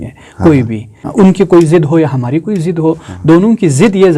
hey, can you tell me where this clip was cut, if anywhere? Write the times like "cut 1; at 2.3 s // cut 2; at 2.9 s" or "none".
cut 1; at 1.1 s